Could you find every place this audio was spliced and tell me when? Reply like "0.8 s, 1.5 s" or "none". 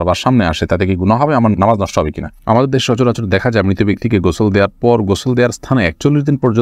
2.3 s